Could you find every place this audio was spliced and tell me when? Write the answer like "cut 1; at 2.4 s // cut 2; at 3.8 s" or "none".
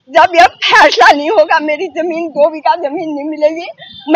none